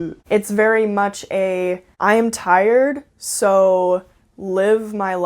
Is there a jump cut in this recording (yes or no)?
yes